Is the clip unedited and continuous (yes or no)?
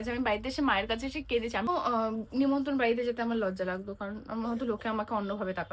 no